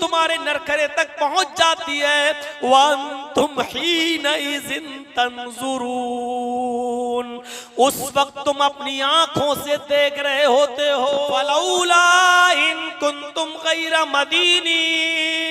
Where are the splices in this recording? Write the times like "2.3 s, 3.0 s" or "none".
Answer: 11.5 s